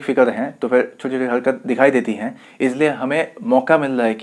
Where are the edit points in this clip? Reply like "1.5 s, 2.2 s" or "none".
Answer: none